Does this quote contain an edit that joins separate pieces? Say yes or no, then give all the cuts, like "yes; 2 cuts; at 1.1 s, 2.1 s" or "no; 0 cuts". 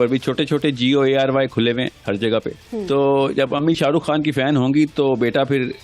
yes; 1 cut; at 2.7 s